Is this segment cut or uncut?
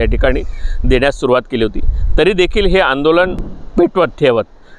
cut